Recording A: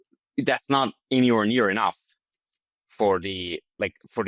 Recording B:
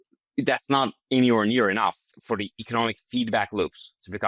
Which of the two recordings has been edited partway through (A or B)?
B